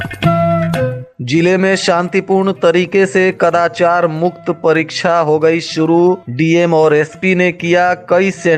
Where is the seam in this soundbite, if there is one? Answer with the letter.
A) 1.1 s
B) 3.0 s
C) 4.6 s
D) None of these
A